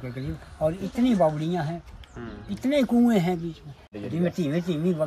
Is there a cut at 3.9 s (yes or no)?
yes